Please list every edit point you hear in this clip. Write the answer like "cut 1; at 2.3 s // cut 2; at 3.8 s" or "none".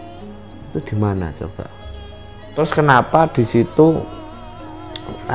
cut 1; at 2.5 s